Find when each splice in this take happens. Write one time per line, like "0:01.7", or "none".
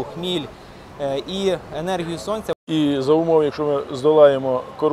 0:02.6